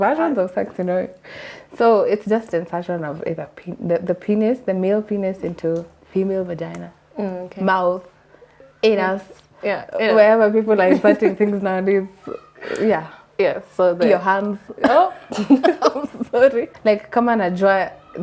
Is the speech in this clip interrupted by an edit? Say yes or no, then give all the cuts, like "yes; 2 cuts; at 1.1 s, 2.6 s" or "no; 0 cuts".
yes; 1 cut; at 16.7 s